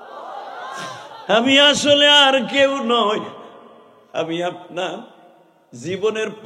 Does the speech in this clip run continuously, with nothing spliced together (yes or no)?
yes